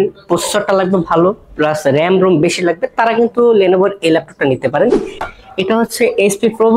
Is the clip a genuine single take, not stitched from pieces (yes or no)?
no